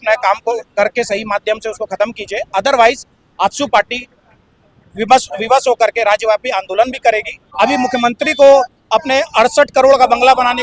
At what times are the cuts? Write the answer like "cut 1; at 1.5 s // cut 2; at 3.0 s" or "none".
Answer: cut 1; at 7.4 s